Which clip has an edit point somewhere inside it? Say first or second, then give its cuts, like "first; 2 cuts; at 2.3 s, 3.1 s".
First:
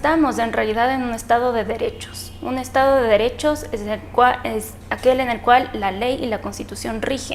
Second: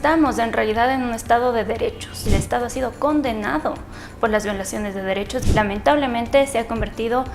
second; 2 cuts; at 2.2 s, 5.4 s